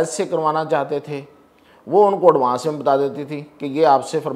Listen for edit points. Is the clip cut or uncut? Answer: uncut